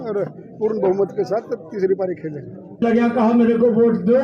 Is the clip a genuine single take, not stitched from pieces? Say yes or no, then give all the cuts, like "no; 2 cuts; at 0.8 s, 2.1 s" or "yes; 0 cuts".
no; 1 cut; at 2.8 s